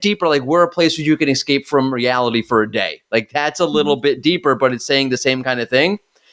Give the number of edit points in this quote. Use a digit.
0